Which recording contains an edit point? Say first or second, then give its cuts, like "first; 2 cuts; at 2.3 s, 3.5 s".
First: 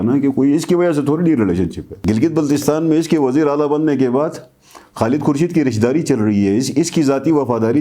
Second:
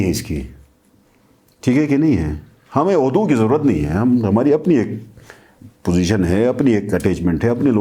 first; 1 cut; at 1.9 s